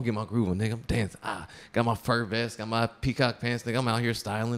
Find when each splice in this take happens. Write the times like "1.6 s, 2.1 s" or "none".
none

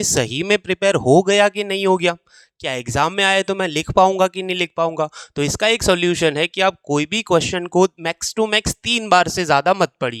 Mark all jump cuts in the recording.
none

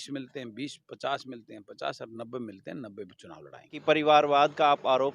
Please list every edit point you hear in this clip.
3.7 s

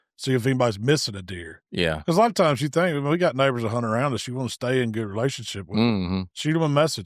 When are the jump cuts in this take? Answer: none

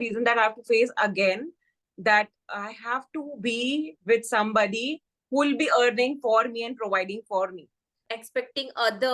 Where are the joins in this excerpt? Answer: 8.1 s

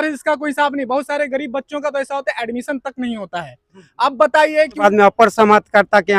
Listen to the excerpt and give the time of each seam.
4.8 s

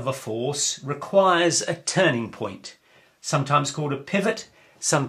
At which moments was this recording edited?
1.1 s

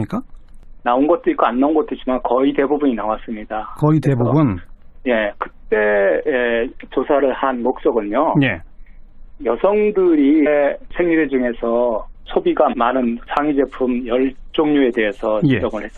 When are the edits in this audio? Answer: none

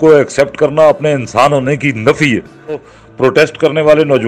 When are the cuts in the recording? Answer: 2.9 s

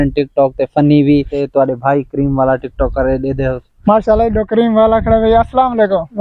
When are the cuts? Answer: 1.4 s

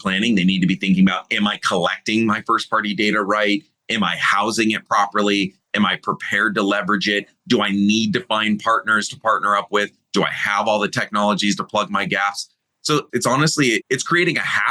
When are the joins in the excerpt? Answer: none

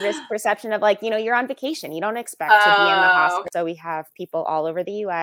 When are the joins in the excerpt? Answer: 3.5 s

